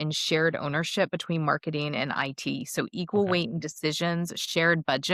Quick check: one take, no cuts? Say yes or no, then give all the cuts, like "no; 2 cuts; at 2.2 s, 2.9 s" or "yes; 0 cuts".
yes; 0 cuts